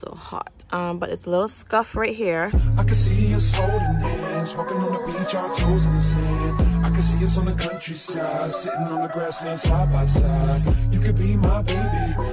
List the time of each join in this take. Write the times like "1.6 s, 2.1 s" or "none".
2.5 s